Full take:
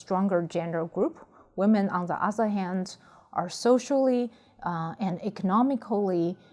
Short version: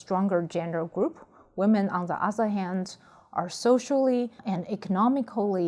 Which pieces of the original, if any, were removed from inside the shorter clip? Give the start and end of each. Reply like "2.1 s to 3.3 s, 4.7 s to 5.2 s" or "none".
4.4 s to 4.9 s